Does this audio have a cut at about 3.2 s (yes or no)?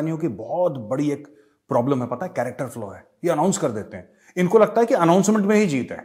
no